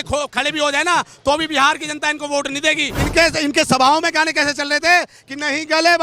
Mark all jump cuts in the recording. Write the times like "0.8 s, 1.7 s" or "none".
2.9 s